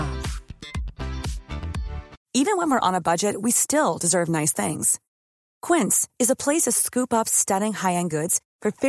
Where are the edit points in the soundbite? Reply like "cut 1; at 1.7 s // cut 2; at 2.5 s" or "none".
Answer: cut 1; at 2.1 s